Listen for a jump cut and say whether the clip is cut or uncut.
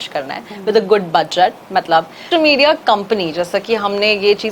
cut